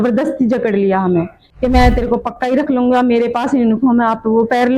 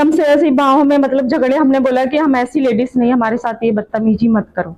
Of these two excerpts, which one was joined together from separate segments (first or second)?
first